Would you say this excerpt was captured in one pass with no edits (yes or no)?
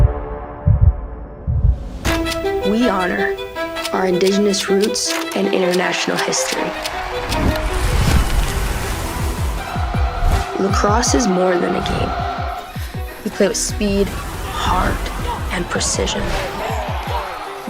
no